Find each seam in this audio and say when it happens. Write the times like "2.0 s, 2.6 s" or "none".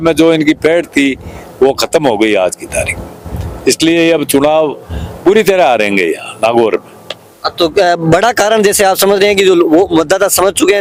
none